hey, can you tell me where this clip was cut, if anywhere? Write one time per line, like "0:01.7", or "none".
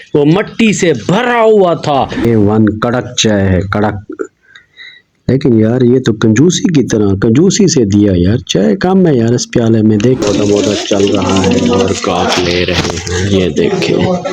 0:02.2
0:10.2